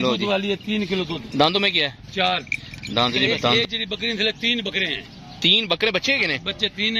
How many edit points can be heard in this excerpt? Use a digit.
1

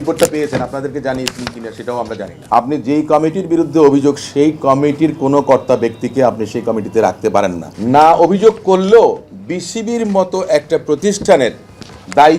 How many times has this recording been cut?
2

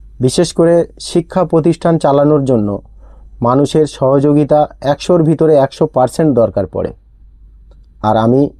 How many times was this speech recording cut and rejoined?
0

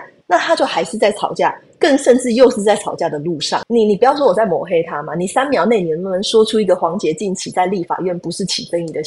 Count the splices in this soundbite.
1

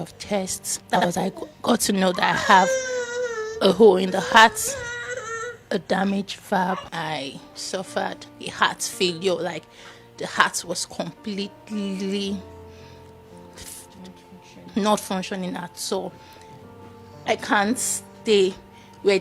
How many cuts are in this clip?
3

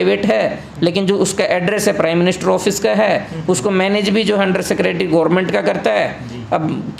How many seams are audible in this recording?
0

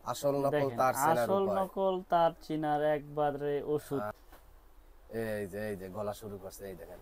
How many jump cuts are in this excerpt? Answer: 1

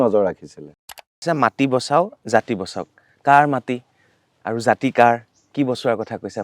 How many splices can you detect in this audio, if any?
1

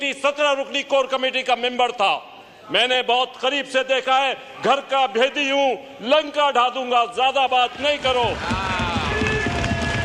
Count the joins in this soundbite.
0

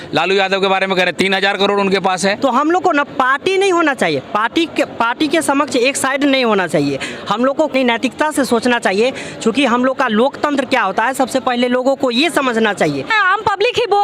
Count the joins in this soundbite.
3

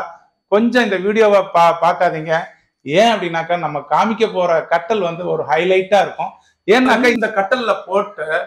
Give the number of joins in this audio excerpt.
1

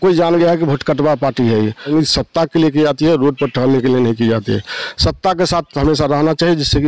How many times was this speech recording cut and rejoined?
1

